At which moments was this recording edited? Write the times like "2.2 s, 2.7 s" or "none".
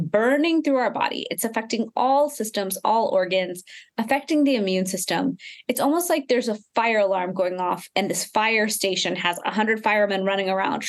none